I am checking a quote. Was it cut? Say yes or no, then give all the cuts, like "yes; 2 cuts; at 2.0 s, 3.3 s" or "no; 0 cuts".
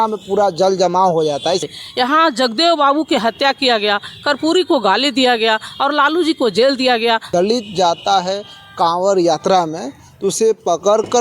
yes; 2 cuts; at 1.7 s, 7.3 s